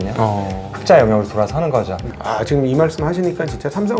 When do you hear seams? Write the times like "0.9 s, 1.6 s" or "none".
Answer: 2.0 s